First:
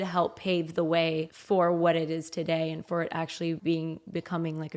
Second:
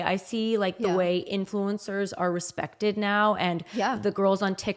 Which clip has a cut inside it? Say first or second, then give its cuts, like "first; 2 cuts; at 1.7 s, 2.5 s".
first; 2 cuts; at 1.4 s, 3.6 s